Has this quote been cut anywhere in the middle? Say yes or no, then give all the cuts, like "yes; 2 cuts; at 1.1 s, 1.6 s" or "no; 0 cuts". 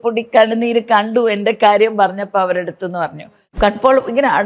yes; 1 cut; at 3.5 s